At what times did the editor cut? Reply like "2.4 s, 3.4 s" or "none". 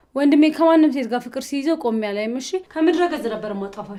none